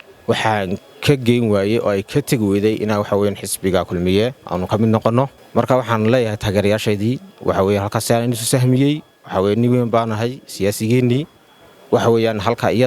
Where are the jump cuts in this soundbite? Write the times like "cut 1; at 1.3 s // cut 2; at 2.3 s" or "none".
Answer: cut 1; at 5.4 s